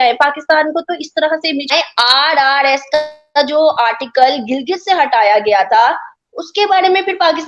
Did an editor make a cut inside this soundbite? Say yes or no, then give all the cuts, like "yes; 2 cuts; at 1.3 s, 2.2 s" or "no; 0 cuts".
yes; 1 cut; at 1.7 s